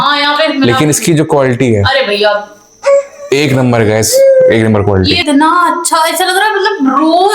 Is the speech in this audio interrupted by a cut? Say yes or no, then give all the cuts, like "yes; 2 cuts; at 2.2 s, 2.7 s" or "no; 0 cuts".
yes; 1 cut; at 5.2 s